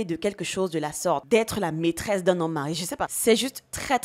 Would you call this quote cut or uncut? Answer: cut